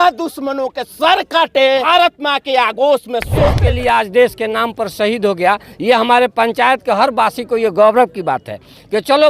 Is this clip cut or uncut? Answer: cut